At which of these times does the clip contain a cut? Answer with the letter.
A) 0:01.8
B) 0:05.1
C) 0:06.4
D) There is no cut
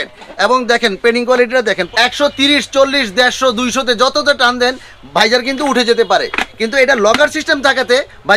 A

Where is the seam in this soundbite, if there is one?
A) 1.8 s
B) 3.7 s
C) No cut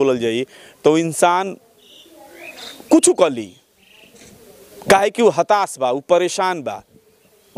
C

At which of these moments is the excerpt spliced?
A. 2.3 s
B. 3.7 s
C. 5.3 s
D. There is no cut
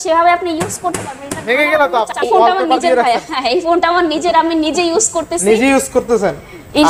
A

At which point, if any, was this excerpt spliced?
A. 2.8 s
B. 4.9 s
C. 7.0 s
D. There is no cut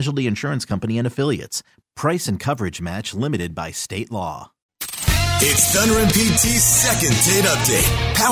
B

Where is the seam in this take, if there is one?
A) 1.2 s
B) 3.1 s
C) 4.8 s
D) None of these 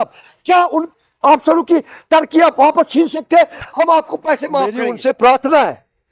C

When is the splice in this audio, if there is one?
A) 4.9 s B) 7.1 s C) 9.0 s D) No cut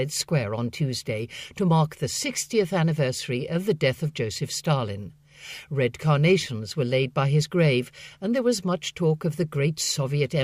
B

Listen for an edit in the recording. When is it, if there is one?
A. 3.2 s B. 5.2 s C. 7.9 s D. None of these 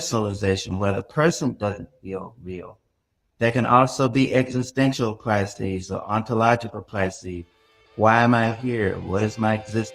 A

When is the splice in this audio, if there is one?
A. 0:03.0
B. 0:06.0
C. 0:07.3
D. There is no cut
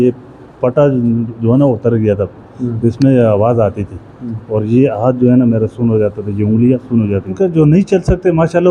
C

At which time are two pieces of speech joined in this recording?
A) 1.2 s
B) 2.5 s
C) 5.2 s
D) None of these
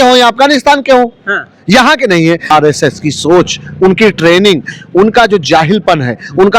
B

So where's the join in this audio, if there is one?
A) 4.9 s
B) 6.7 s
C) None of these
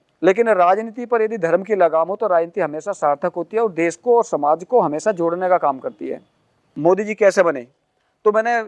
B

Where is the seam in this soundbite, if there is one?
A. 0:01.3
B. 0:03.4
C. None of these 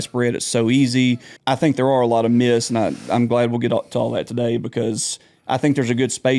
A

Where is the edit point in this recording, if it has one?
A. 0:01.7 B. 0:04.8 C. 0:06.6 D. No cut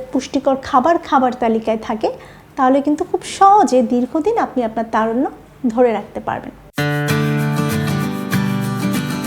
C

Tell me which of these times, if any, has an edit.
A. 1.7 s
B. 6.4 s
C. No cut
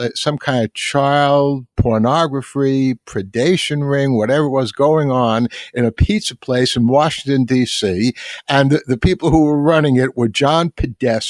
A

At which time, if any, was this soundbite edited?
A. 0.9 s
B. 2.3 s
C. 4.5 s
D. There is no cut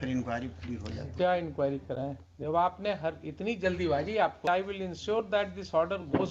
C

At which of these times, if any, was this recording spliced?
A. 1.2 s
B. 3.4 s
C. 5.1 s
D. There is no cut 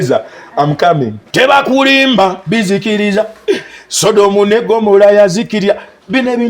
A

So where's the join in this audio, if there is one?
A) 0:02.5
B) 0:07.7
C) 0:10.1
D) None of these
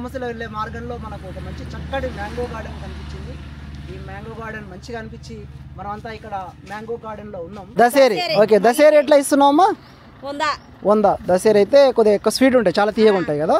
B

